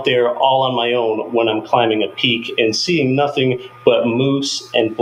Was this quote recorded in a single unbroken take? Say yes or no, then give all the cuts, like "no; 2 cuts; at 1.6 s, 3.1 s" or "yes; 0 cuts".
yes; 0 cuts